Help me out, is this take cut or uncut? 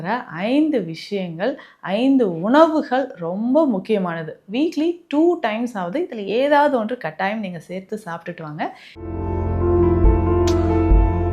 cut